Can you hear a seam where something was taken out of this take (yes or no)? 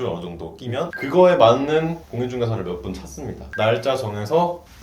yes